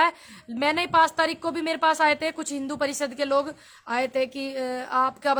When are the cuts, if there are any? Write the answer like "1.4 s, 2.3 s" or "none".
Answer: none